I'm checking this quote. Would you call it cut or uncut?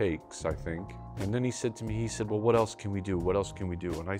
cut